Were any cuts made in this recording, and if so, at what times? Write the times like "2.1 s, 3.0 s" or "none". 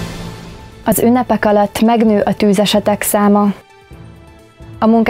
0.9 s